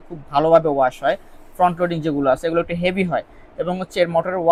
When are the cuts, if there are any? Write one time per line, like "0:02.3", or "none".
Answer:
none